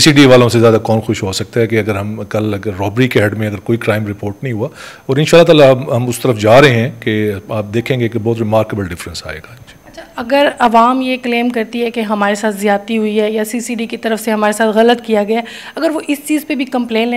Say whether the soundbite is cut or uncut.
uncut